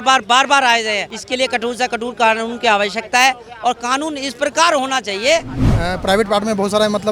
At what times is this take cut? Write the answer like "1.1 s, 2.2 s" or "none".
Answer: 1.1 s, 5.7 s